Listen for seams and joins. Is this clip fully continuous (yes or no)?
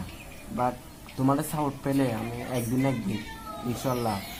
yes